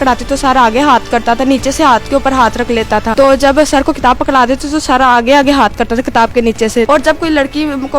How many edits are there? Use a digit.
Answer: 2